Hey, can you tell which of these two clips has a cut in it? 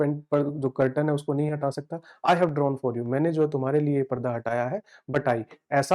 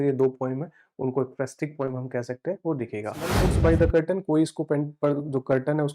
second; 1 cut; at 3.5 s

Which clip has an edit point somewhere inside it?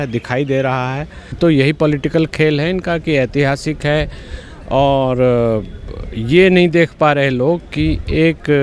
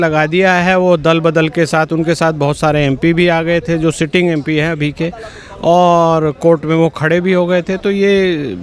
first; 1 cut; at 1.4 s

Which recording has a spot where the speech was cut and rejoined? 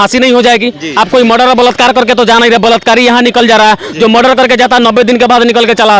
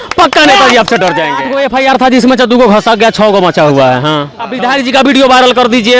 second; 2 cuts; at 1.5 s, 4.4 s

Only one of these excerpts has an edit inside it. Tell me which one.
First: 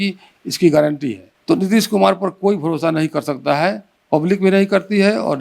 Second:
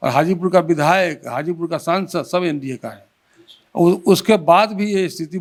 first; 1 cut; at 1.3 s

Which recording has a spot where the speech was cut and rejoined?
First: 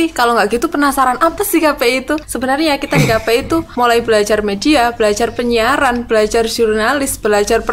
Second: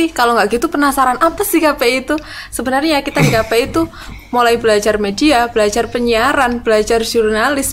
first; 2 cuts; at 2.3 s, 3.7 s

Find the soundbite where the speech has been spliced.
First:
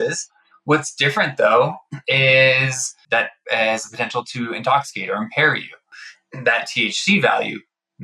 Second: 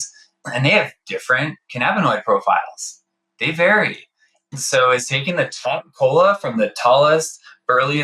first; 2 cuts; at 3.3 s, 5.9 s

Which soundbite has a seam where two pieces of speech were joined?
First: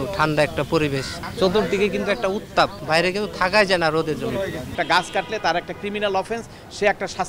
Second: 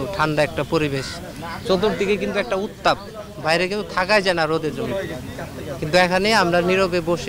first; 3 cuts; at 1.2 s, 2.8 s, 4.8 s

